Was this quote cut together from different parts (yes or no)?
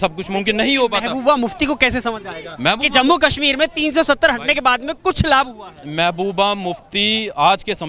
no